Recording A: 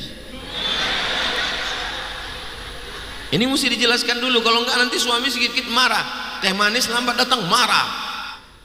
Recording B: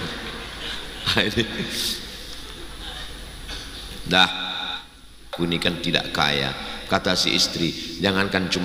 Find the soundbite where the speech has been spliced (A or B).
B